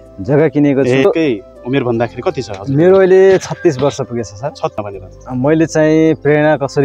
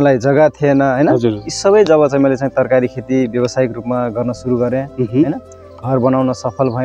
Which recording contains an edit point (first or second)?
first